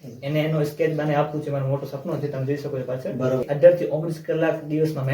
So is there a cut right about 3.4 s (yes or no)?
yes